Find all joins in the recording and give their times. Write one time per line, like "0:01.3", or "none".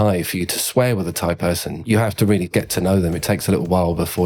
none

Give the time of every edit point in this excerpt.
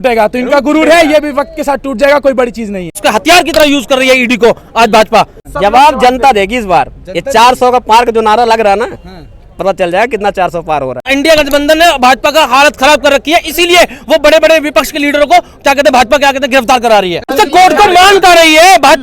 0:02.9
0:05.4
0:11.1
0:17.3

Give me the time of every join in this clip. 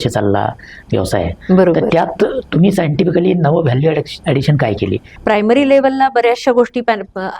0:05.1

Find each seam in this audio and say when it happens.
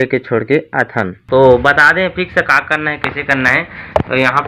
0:01.1

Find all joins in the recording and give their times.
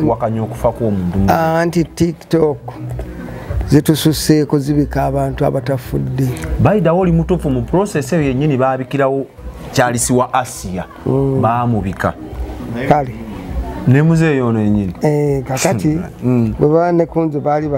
none

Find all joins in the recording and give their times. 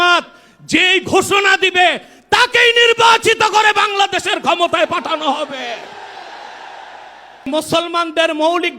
0:07.5

